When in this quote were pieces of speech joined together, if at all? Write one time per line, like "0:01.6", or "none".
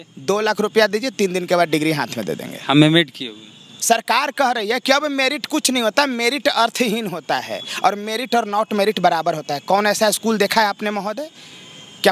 0:03.7